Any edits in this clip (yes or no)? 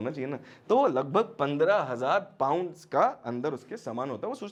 no